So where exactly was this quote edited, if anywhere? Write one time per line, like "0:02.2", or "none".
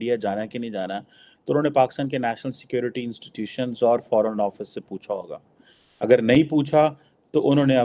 none